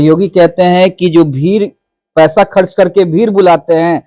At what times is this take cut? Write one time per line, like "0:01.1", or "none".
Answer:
none